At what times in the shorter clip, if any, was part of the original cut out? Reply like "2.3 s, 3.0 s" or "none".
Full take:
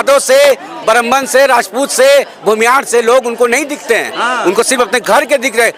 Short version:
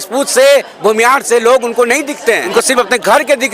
2.5 s